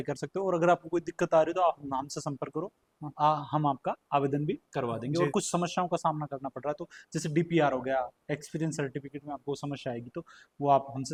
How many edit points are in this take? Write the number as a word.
zero